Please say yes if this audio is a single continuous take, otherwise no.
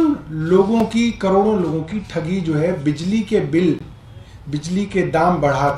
yes